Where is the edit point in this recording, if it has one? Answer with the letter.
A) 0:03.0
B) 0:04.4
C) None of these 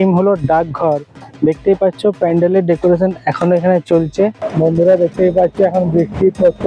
B